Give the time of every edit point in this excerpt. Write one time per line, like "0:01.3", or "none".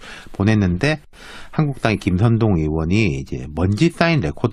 0:01.8

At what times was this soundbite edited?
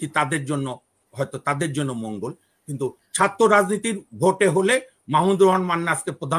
none

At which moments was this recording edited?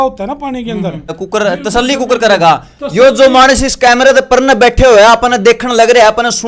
0:01.2

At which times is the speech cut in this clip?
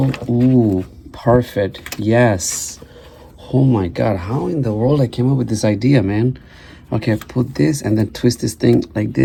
none

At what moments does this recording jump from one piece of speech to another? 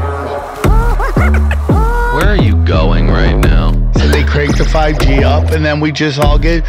none

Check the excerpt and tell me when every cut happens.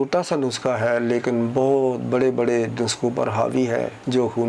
none

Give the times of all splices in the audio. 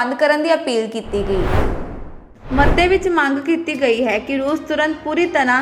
none

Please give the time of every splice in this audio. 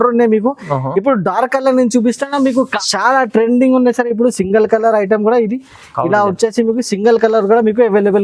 0:02.8

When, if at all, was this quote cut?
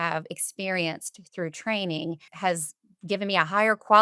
0:02.3

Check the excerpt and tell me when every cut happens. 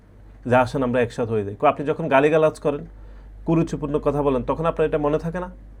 none

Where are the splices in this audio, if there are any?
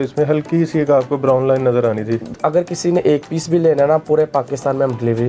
0:02.3

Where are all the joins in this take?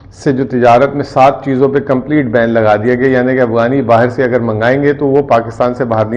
none

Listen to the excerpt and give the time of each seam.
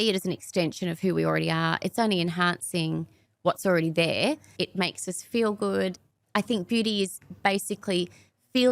0:04.6
0:06.0

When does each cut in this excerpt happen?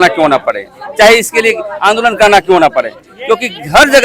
none

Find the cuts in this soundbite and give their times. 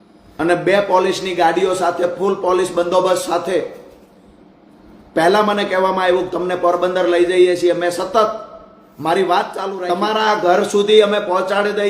0:09.8

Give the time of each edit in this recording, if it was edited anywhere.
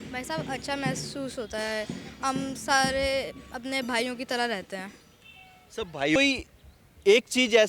0:06.2

